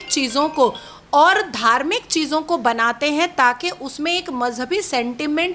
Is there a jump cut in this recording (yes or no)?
no